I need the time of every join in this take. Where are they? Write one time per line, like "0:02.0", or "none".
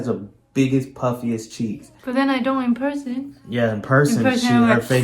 0:01.9